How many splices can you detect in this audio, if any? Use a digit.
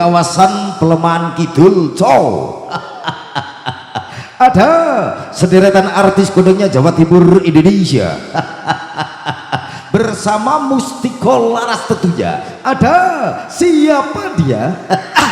0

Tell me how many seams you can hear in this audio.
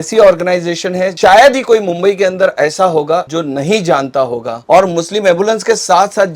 0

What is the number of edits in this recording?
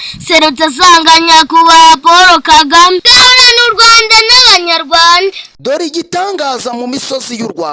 2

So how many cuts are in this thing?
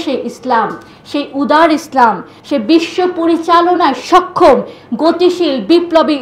1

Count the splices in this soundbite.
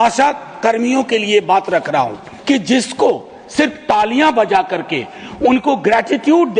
1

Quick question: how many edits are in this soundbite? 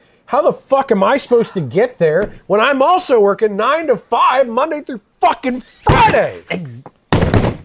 0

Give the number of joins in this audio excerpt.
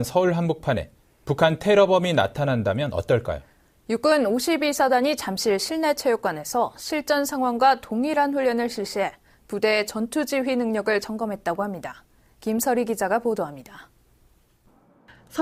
0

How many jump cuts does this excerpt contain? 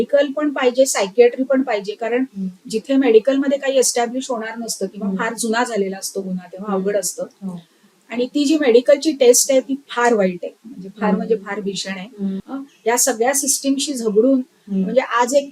1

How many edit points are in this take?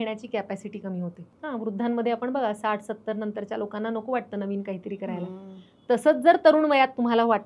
1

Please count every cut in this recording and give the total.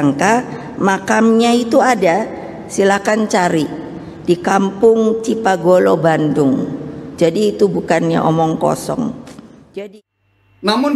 1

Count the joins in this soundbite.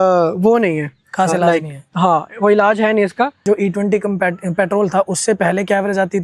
1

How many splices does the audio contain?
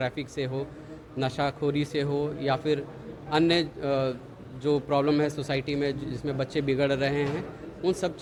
0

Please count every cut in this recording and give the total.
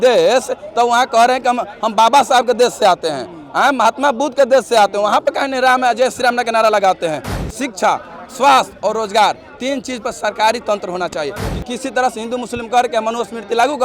2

